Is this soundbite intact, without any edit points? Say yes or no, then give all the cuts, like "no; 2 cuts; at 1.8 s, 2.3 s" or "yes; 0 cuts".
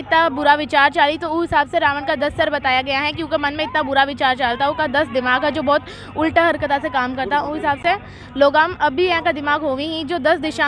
yes; 0 cuts